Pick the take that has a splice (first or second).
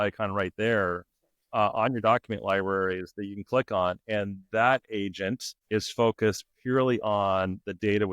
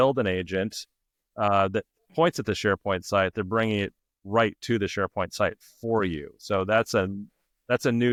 first